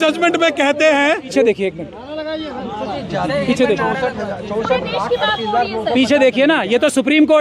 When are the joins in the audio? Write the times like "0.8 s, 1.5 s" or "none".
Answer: 1.3 s